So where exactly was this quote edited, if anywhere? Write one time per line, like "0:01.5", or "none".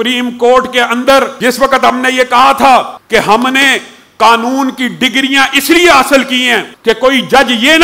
0:01.3
0:03.0
0:06.6